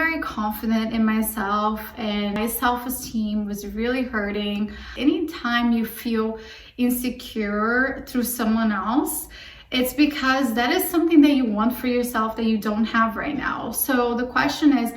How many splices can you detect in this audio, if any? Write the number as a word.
two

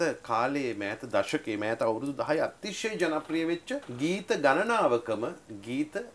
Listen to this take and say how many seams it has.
one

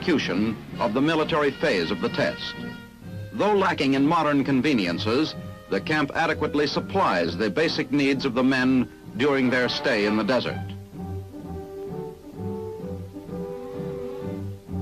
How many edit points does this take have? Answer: zero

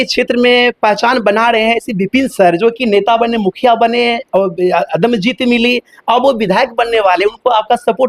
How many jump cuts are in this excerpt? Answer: zero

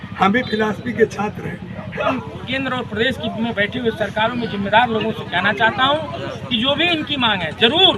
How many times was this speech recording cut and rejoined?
one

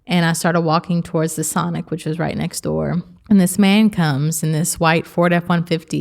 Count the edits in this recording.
one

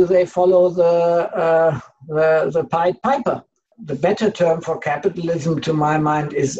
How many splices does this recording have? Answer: one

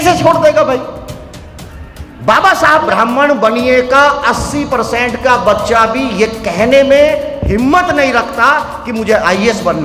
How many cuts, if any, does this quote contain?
one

